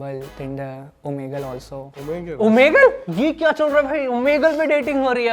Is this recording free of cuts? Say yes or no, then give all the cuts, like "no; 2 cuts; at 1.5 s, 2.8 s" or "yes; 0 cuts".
no; 1 cut; at 3.0 s